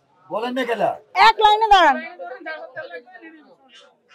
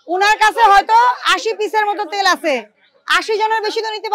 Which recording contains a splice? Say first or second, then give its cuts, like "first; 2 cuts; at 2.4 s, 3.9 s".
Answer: first; 1 cut; at 1.0 s